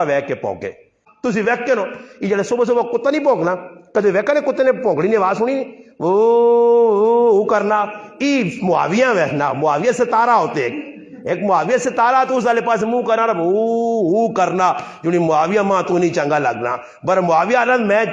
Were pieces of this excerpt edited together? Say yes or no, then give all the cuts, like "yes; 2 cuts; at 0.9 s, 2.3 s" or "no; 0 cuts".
yes; 1 cut; at 1.0 s